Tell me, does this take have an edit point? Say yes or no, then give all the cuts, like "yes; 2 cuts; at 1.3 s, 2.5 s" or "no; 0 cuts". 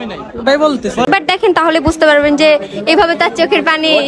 yes; 1 cut; at 1.1 s